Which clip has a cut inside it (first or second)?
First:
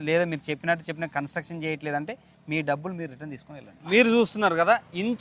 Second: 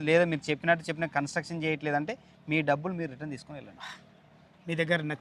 first